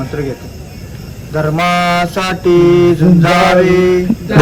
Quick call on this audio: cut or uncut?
uncut